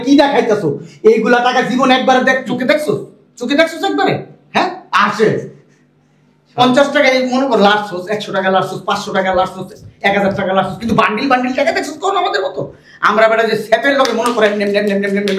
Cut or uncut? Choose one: uncut